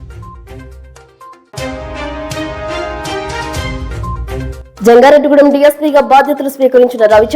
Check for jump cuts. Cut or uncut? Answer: cut